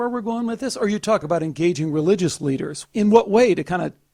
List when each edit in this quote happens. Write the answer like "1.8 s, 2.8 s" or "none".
1.2 s, 2.8 s